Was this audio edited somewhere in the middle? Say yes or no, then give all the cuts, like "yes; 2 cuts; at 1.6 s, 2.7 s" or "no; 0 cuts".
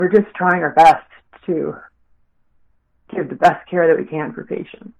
no; 0 cuts